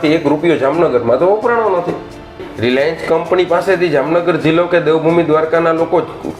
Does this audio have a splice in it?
yes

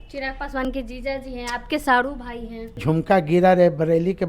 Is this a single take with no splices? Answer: no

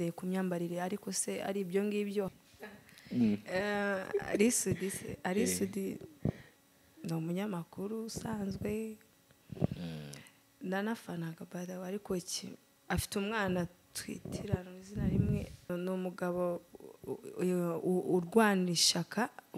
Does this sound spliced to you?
yes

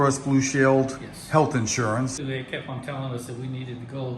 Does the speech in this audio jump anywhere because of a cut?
yes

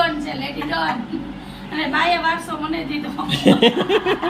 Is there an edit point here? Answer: no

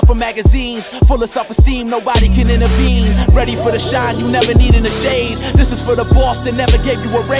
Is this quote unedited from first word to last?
yes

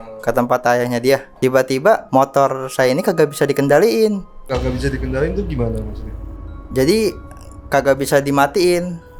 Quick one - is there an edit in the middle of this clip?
yes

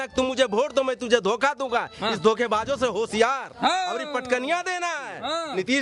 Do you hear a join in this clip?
no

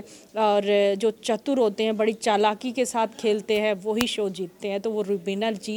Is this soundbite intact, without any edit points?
yes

